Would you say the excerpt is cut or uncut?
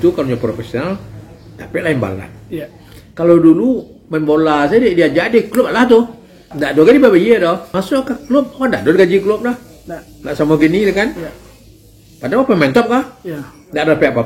cut